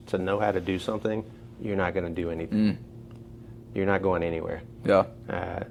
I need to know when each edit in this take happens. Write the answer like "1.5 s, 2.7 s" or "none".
none